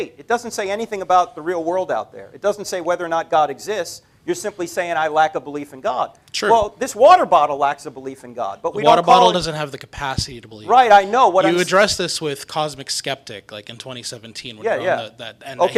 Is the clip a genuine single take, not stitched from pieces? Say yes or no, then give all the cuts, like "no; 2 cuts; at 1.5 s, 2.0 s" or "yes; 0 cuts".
yes; 0 cuts